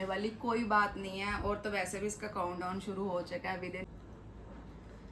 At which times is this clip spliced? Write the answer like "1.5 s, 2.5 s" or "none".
3.8 s